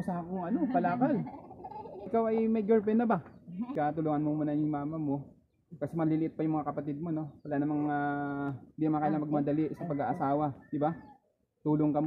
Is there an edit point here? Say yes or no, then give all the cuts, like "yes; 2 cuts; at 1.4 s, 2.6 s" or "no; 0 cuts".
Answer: yes; 2 cuts; at 2.1 s, 3.7 s